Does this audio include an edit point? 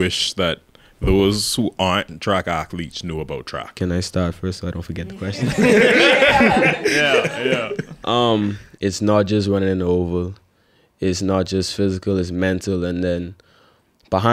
no; 0 cuts

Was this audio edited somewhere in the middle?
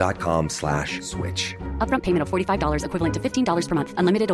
no; 0 cuts

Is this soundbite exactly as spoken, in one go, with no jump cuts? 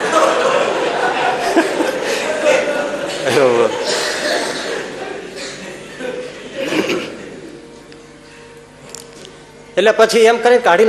yes; 0 cuts

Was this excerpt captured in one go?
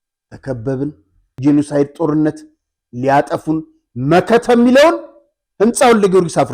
yes; 0 cuts

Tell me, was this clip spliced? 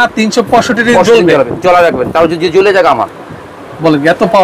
no; 0 cuts

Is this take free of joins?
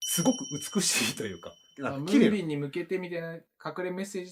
yes; 0 cuts

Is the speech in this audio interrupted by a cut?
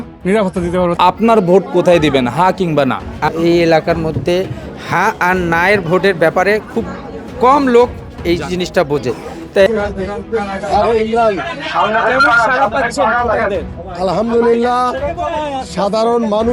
yes; 3 cuts; at 0.9 s, 3.3 s, 9.7 s

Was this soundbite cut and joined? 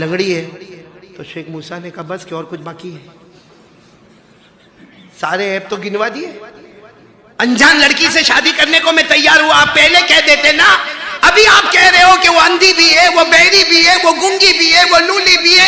no; 0 cuts

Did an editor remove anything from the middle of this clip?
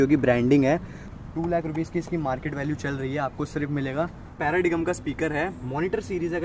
yes; 2 cuts; at 1.0 s, 4.4 s

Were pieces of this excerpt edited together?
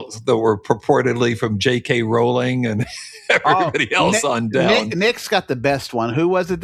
no; 0 cuts

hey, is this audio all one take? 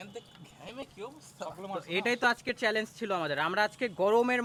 yes; 0 cuts

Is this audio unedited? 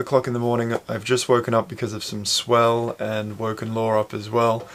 yes; 0 cuts

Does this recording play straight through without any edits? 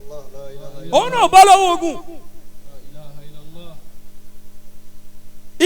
yes; 0 cuts

